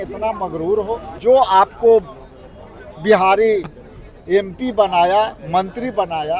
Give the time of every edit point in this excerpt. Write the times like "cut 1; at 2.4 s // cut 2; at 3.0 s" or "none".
cut 1; at 1.1 s

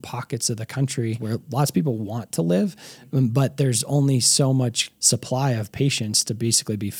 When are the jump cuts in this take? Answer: cut 1; at 1.2 s // cut 2; at 4.9 s

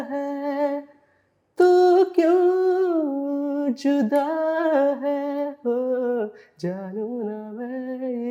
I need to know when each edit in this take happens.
none

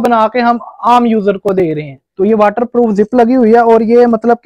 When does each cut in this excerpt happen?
cut 1; at 2.0 s

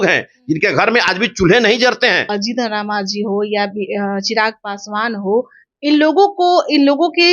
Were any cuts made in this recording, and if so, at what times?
cut 1; at 2.3 s

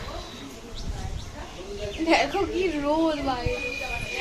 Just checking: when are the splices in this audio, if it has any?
none

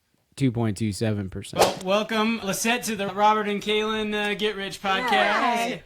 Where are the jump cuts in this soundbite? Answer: cut 1; at 1.5 s

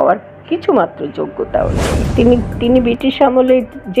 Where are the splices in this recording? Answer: cut 1; at 1.9 s

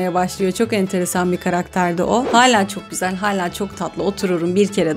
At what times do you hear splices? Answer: cut 1; at 2.3 s

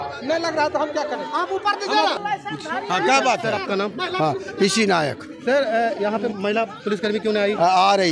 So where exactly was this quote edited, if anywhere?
cut 1; at 2.2 s

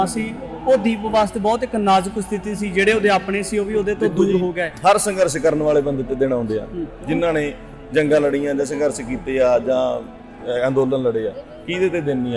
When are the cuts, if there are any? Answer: none

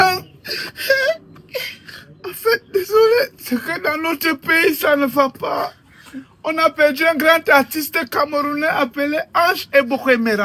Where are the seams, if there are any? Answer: none

